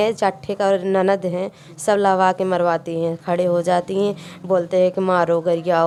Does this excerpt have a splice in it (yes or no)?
no